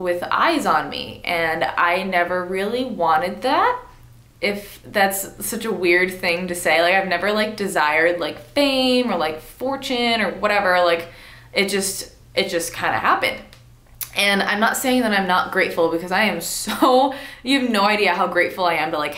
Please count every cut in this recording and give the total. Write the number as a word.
zero